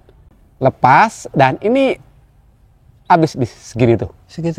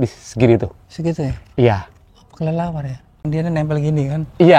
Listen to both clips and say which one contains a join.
second; 1 cut; at 3.2 s

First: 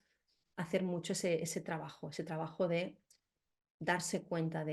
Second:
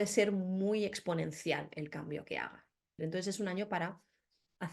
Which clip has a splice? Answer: second; 1 cut; at 3.0 s

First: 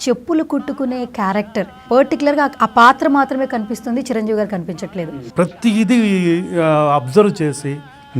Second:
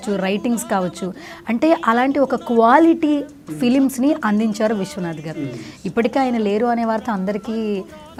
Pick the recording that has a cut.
first; 2 cuts; at 1.8 s, 5.0 s

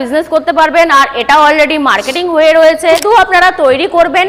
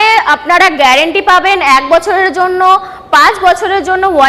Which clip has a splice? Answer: first; 1 cut; at 3.0 s

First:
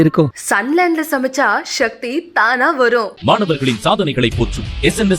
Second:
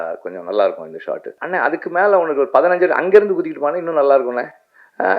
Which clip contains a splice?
second; 1 cut; at 1.4 s

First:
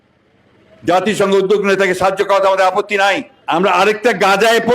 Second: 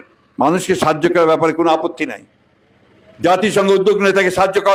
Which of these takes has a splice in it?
first; 1 cut; at 3.3 s

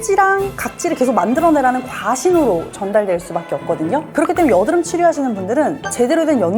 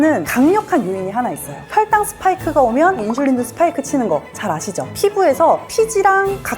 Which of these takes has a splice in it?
second; 2 cuts; at 1.5 s, 4.9 s

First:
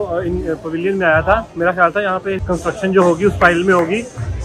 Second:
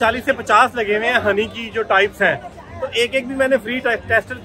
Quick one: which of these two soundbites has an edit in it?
first; 1 cut; at 2.4 s

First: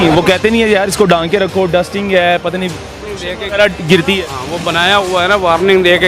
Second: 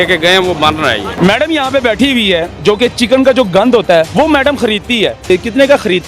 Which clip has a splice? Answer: second; 4 cuts; at 1.1 s, 2.5 s, 4.1 s, 5.3 s

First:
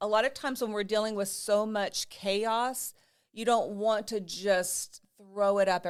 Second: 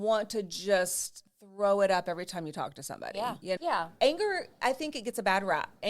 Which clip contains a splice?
second; 1 cut; at 3.6 s

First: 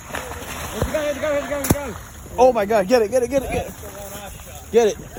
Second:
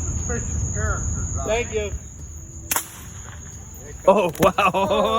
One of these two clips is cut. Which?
second; 1 cut; at 2.0 s

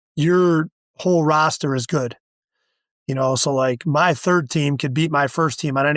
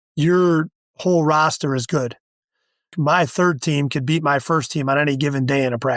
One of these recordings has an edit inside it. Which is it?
second; 1 cut; at 2.9 s

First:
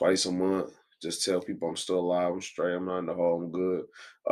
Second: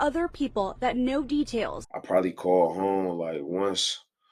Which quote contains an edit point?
second; 1 cut; at 1.8 s

